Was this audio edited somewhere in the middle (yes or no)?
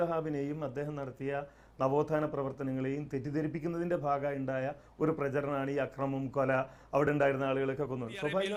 no